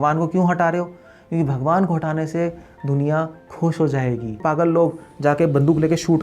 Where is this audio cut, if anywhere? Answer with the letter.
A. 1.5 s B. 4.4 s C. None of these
B